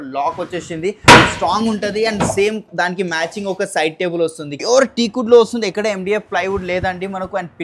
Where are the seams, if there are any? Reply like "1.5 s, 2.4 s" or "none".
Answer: 4.5 s